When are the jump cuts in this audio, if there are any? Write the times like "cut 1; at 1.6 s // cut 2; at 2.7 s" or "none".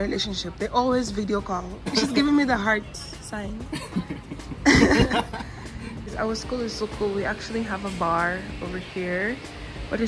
cut 1; at 1.9 s // cut 2; at 6.1 s

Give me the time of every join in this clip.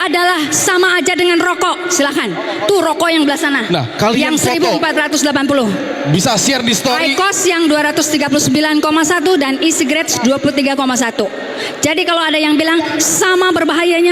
none

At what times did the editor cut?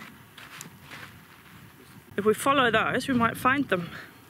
cut 1; at 2.1 s

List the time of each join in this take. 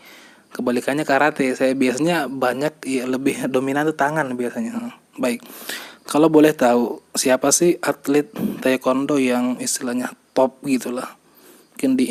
none

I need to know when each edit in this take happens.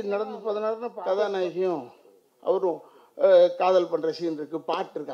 cut 1; at 0.9 s

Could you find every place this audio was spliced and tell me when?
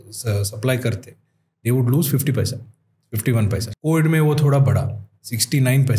cut 1; at 3.7 s

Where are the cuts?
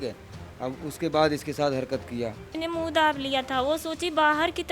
cut 1; at 2.5 s

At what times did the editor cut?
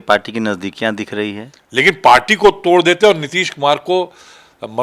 cut 1; at 1.5 s

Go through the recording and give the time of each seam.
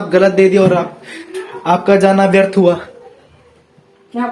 none

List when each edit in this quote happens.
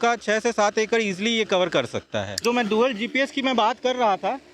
cut 1; at 2.4 s

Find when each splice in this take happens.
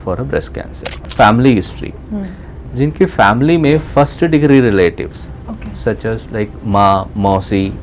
cut 1; at 1.1 s

